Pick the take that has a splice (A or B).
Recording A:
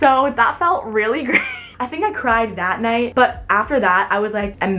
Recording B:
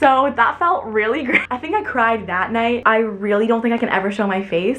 B